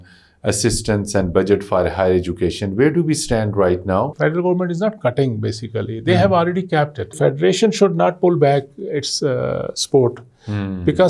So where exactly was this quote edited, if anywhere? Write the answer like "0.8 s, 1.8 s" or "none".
4.1 s, 7.2 s

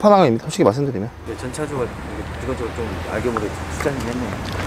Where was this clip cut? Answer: 1.2 s

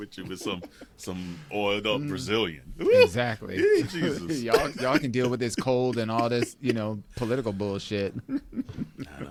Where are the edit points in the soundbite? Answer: none

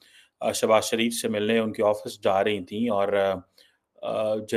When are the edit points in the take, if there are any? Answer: none

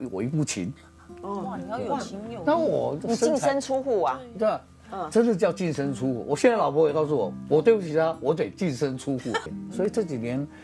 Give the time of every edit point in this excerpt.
9.4 s

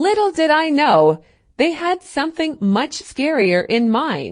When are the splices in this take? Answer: 1.4 s

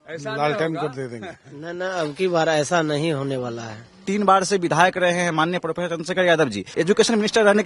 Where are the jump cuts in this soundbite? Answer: 4.0 s, 6.7 s

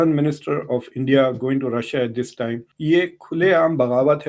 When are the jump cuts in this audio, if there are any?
2.7 s

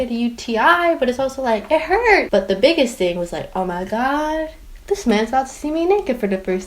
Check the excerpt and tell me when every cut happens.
2.3 s

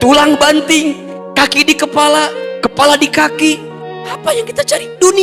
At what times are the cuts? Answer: none

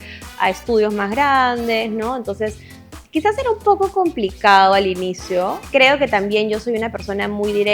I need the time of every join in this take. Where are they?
5.6 s

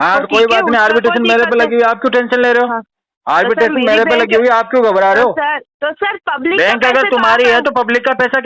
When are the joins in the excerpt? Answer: 5.7 s

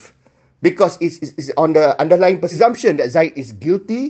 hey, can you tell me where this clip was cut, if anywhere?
2.6 s

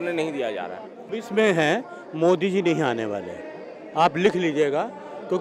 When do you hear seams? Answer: 1.1 s

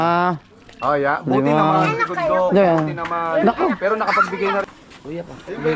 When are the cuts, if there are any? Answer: 4.7 s

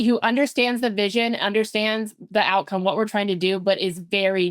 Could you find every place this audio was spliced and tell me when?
none

